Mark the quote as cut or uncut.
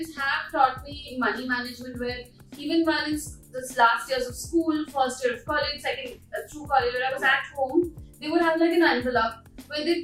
uncut